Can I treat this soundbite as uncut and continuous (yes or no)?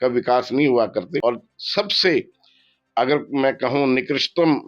no